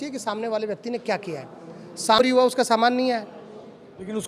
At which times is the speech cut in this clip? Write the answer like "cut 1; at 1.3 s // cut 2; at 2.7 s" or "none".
cut 1; at 2.2 s